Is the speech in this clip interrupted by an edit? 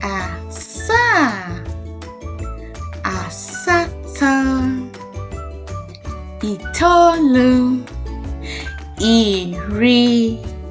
no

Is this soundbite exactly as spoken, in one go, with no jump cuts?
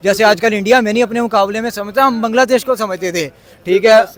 yes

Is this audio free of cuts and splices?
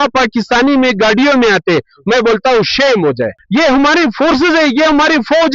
no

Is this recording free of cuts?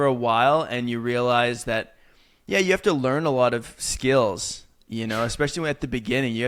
yes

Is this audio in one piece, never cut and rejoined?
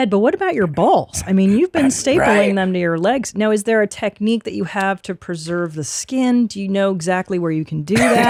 yes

